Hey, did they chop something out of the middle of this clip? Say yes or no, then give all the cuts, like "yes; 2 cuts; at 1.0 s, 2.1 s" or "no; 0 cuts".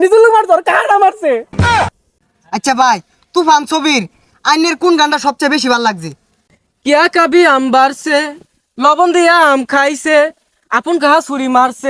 yes; 2 cuts; at 1.8 s, 6.3 s